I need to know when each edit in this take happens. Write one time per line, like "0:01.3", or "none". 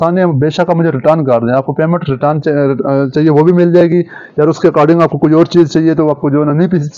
none